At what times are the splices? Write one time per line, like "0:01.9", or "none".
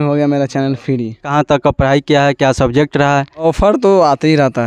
0:01.3
0:03.4